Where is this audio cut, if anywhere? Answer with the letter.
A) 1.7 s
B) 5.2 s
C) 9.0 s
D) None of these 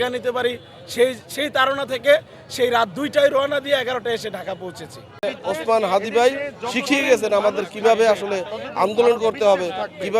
B